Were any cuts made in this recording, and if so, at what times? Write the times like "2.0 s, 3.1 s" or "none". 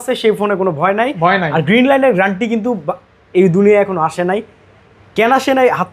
none